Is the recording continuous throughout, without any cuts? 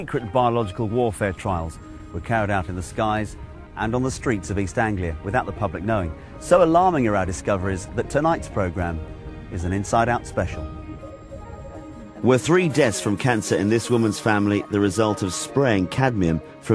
yes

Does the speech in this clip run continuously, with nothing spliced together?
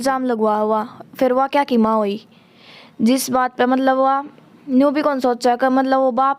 yes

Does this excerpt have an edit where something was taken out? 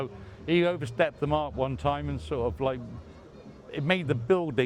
no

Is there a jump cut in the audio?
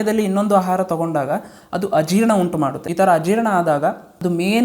no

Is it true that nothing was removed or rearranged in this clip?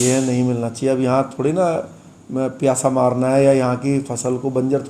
yes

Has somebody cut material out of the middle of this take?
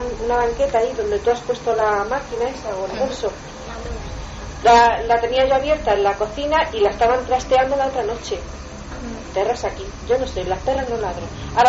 no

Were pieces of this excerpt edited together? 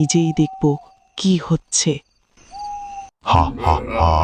yes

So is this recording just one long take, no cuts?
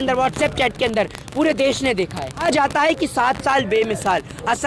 no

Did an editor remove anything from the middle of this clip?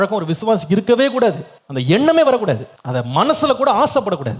yes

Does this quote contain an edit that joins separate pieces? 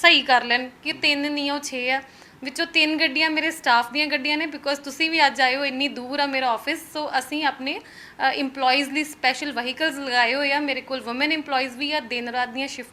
no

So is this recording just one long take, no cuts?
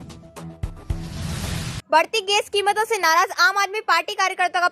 no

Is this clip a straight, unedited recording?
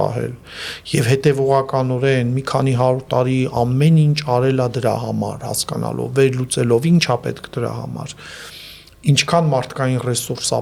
yes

